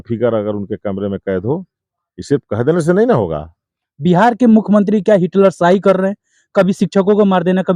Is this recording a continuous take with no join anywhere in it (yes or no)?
yes